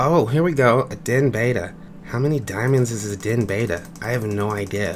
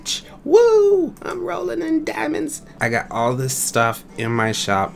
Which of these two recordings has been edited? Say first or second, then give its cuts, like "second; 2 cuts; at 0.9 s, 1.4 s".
second; 1 cut; at 2.8 s